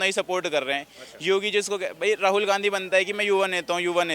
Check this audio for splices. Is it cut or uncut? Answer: uncut